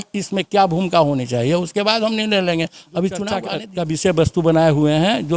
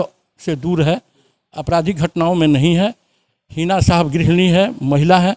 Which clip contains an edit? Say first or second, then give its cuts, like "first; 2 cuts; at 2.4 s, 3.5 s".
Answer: first; 1 cut; at 3.6 s